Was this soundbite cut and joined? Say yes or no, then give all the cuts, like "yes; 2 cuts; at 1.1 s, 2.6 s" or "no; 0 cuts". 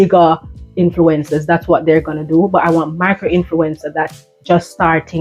no; 0 cuts